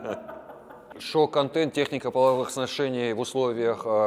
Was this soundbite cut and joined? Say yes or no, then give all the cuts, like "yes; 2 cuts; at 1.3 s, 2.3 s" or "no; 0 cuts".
yes; 1 cut; at 0.9 s